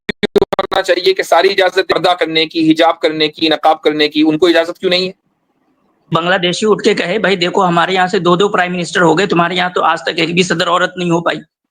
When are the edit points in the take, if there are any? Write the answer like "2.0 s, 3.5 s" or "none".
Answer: 1.9 s, 6.1 s